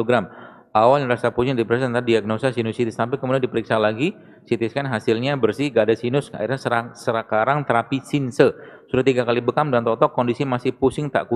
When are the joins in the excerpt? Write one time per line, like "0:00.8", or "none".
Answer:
none